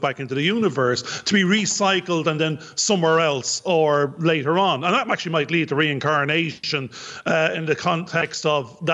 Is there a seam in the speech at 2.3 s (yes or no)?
no